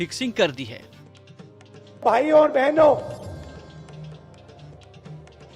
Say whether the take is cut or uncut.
uncut